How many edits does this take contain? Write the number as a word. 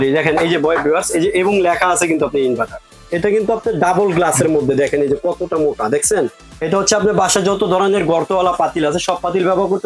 two